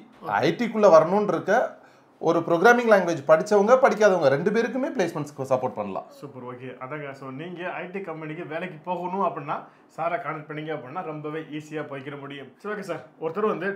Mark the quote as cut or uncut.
uncut